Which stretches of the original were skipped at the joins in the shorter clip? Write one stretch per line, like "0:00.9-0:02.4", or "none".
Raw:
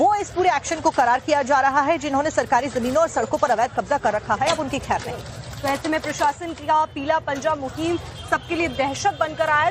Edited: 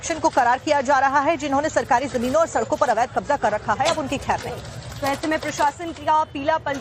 none